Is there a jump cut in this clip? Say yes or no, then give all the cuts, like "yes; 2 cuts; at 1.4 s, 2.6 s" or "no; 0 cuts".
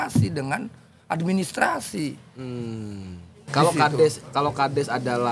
yes; 1 cut; at 3.4 s